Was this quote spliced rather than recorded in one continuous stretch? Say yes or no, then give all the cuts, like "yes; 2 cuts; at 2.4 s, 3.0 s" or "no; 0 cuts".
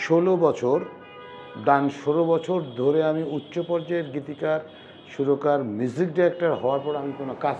no; 0 cuts